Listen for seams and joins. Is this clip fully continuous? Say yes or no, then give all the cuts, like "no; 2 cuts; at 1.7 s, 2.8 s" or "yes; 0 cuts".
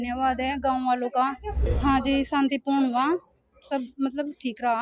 no; 1 cut; at 1.6 s